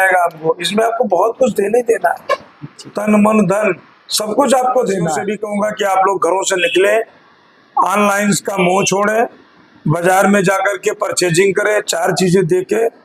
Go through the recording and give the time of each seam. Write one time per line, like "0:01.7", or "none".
0:05.3